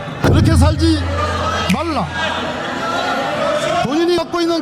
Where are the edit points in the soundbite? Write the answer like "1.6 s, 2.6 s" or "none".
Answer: none